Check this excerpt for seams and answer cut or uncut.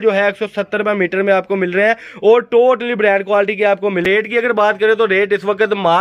cut